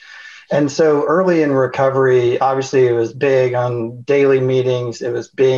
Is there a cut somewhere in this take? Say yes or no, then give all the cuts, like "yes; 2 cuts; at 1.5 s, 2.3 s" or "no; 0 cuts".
no; 0 cuts